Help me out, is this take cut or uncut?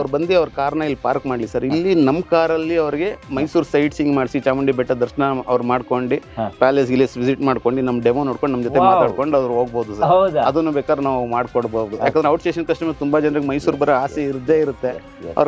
uncut